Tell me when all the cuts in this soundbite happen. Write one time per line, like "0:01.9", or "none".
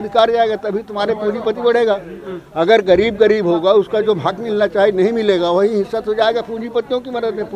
none